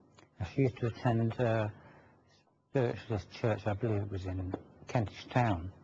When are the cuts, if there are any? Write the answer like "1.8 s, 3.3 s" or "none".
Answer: 4.3 s